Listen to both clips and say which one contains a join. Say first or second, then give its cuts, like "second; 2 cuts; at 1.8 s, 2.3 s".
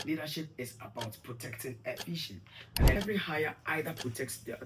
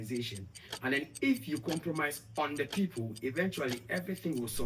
first; 1 cut; at 3.0 s